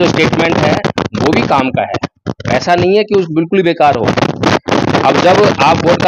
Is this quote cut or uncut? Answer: uncut